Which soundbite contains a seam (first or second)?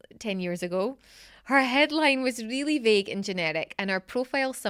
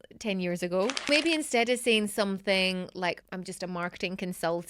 second